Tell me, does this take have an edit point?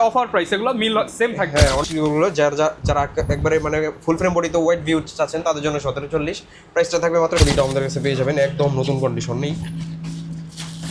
yes; 2 cuts; at 1.9 s, 7.4 s

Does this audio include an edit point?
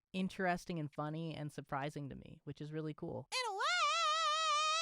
yes; 1 cut; at 3.3 s

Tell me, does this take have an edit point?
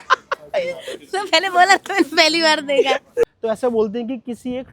yes; 1 cut; at 3.2 s

